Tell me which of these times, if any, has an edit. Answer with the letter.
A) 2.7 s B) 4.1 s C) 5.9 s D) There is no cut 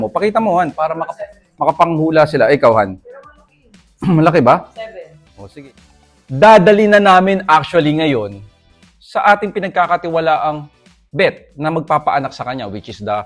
C